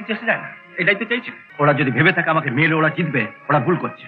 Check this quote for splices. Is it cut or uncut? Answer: cut